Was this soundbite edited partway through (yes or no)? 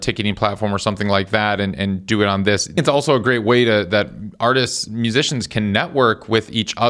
yes